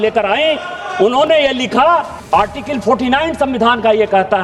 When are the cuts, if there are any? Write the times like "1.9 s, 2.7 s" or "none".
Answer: 2.1 s